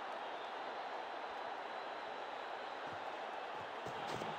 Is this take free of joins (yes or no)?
yes